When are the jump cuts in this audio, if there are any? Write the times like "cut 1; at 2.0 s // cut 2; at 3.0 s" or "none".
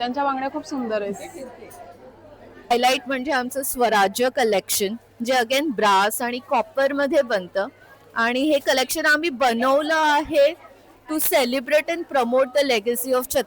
cut 1; at 2.7 s